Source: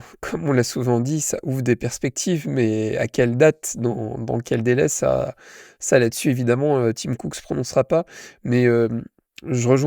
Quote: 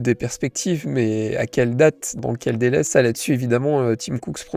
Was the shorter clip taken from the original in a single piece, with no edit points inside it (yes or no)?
no